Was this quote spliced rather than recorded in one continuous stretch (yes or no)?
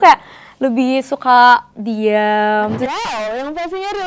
yes